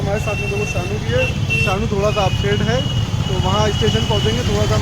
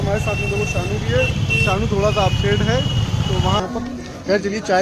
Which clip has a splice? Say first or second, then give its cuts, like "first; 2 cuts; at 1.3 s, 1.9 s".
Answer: second; 1 cut; at 3.6 s